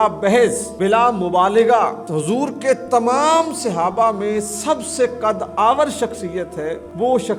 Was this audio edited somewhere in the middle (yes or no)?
no